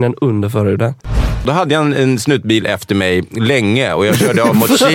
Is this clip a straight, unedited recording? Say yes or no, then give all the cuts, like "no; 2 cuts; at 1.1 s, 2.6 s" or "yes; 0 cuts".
no; 1 cut; at 1.4 s